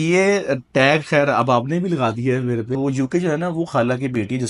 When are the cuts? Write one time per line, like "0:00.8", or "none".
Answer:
0:02.8